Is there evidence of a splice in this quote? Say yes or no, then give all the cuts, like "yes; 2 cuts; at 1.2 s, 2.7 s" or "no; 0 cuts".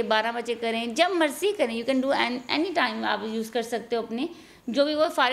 no; 0 cuts